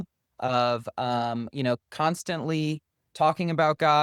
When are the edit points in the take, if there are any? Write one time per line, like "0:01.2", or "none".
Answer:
none

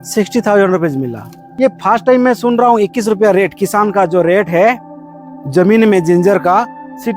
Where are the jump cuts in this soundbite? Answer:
0:01.4

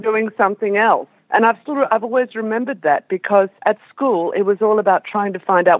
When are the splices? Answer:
0:01.1
0:03.5

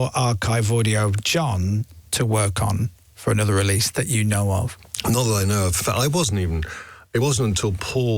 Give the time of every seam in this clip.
0:04.8

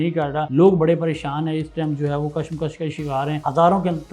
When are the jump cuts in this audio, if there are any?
none

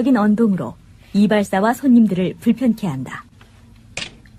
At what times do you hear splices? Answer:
none

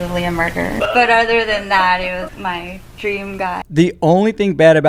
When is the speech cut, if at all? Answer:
0:02.3
0:03.7

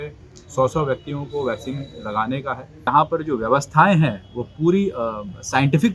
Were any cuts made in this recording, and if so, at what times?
0:02.9

